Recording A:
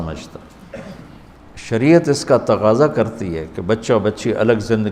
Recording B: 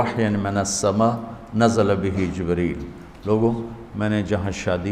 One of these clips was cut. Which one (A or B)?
A